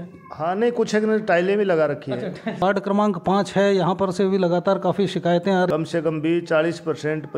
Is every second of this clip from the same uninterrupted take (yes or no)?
no